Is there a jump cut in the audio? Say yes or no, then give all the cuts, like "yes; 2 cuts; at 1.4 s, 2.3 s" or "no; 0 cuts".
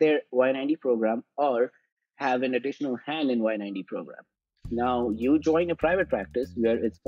no; 0 cuts